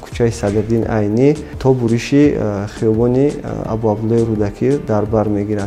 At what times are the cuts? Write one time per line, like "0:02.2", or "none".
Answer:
0:01.5

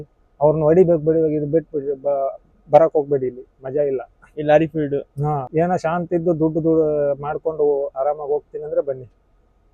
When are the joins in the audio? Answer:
0:05.4

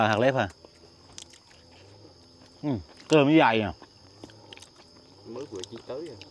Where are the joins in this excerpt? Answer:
none

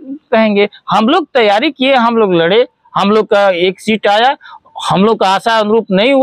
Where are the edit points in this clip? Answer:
none

